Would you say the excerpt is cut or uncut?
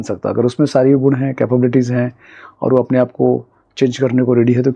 uncut